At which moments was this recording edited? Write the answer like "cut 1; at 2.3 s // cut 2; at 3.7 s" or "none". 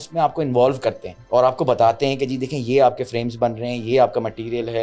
cut 1; at 1.1 s